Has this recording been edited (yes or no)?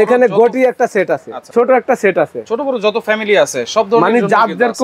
yes